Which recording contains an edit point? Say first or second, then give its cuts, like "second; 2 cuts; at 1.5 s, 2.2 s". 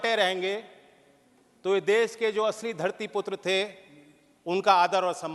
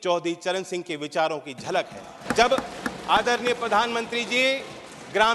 second; 1 cut; at 2.2 s